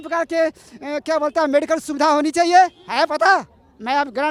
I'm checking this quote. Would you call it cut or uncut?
uncut